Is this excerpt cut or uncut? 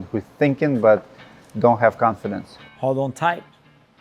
cut